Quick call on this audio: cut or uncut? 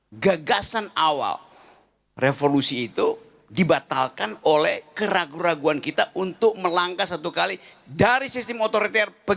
uncut